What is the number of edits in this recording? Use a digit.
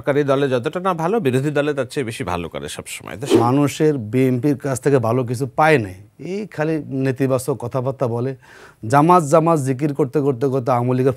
1